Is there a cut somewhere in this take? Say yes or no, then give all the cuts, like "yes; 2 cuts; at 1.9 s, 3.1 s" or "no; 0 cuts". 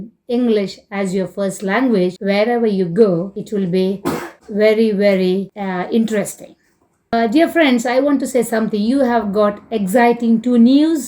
yes; 5 cuts; at 2.2 s, 3.4 s, 4.3 s, 5.5 s, 7.1 s